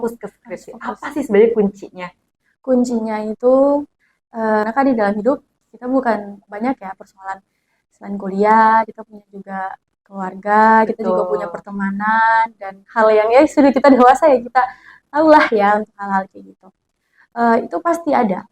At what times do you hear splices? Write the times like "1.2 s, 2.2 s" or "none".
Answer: 4.6 s